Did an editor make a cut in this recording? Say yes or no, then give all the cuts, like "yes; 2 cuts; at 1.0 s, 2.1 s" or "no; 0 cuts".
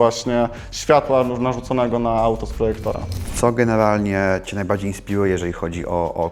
yes; 1 cut; at 3.2 s